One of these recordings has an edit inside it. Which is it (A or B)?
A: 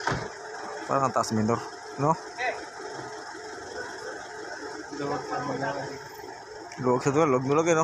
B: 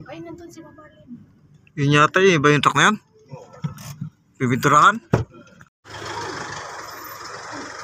B